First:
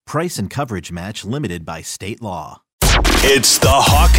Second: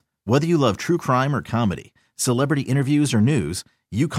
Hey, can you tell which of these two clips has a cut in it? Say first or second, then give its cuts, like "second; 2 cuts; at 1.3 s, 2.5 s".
first; 1 cut; at 2.6 s